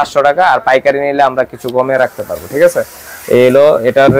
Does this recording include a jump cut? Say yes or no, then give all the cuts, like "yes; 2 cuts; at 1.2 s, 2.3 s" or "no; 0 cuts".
no; 0 cuts